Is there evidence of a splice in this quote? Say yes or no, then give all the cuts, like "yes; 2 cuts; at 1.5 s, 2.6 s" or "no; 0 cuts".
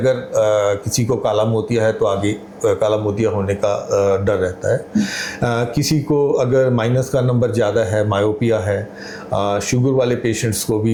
no; 0 cuts